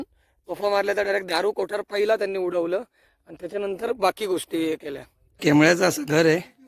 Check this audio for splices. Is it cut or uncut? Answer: cut